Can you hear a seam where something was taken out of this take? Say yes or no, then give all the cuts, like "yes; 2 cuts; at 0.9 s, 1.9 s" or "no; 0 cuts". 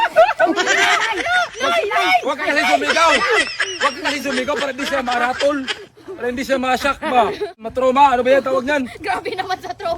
yes; 1 cut; at 7.7 s